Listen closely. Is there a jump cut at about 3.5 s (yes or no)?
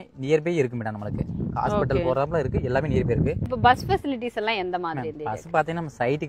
yes